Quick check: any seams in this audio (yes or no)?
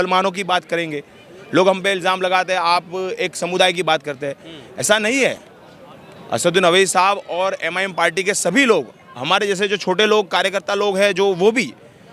no